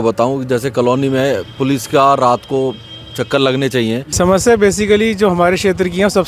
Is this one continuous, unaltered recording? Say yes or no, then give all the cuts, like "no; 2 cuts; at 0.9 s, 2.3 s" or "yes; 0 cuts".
no; 1 cut; at 4.1 s